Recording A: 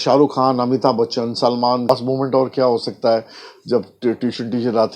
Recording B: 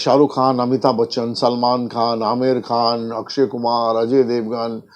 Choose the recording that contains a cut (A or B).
A